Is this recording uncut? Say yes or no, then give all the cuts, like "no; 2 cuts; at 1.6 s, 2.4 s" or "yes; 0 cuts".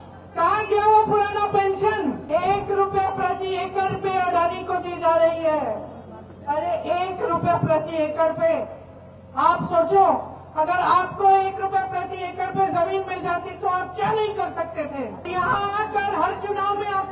no; 2 cuts; at 2.2 s, 15.3 s